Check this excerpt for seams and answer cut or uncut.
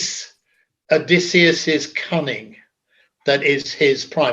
uncut